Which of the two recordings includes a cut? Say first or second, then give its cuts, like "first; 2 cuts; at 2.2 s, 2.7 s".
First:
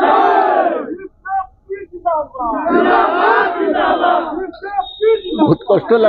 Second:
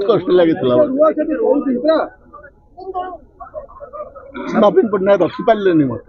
second; 2 cuts; at 1.4 s, 4.3 s